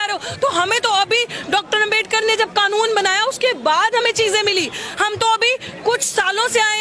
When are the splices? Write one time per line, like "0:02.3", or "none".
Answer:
none

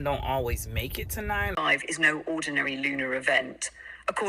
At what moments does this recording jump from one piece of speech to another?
0:01.6

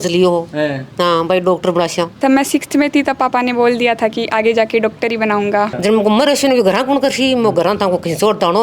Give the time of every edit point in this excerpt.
0:02.1
0:05.8

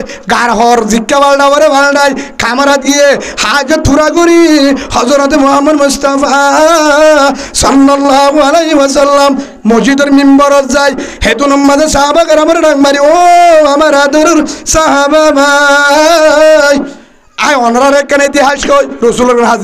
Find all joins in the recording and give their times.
none

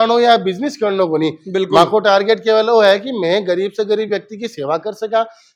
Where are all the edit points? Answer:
none

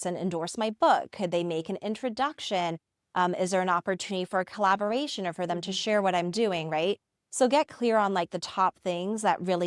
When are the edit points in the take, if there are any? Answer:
none

